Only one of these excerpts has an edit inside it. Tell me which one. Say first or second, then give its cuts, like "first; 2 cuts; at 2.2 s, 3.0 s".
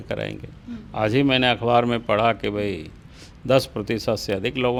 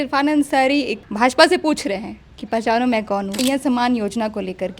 second; 2 cuts; at 1.0 s, 3.4 s